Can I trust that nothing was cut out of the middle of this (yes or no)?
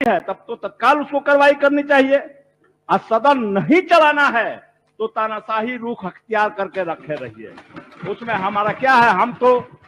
yes